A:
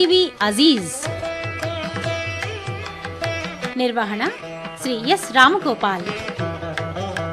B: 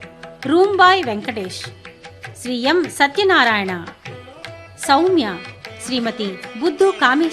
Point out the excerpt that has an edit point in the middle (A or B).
A